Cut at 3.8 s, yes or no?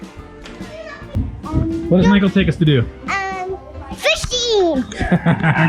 no